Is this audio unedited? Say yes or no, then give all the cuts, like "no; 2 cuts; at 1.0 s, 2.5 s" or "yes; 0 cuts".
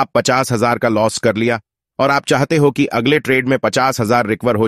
yes; 0 cuts